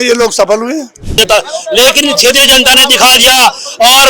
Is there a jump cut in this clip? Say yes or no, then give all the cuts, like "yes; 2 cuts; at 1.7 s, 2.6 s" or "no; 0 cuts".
yes; 1 cut; at 1.1 s